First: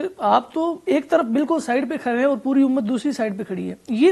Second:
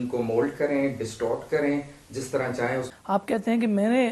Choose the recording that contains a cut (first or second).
second